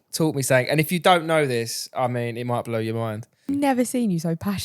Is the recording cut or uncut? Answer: cut